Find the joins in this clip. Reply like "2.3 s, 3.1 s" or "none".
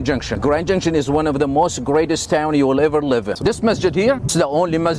3.4 s, 4.3 s